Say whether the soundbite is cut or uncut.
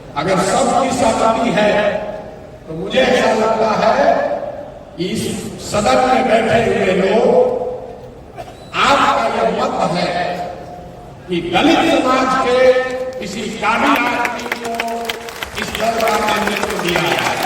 uncut